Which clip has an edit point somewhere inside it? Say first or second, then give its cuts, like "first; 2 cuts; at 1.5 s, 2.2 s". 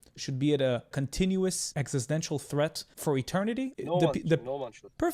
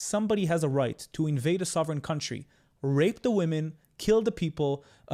first; 3 cuts; at 0.9 s, 1.7 s, 3.2 s